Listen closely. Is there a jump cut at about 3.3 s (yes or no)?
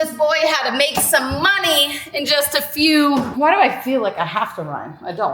yes